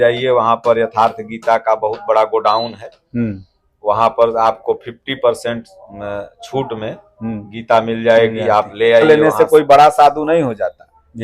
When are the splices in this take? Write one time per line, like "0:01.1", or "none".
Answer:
0:09.0